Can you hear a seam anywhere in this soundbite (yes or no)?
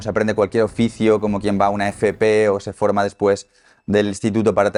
no